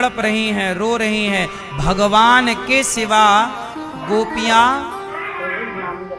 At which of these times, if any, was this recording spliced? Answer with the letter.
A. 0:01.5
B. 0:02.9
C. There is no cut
C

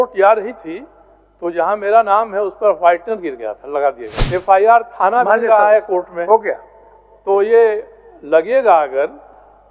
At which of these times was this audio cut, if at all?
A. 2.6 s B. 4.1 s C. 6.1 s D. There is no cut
B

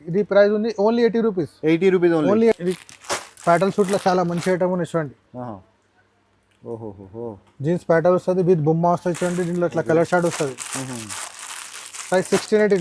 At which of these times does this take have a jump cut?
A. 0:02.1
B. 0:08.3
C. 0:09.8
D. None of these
D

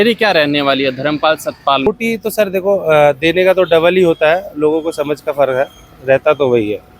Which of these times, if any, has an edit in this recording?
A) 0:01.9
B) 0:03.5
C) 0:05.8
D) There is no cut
A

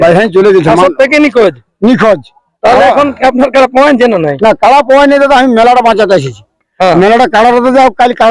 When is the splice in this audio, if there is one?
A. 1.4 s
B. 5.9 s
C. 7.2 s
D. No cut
D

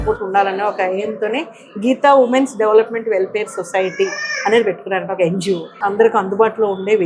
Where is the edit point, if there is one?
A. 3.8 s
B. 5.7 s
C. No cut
B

